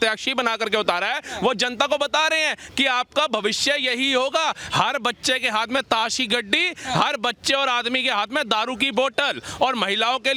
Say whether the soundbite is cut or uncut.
uncut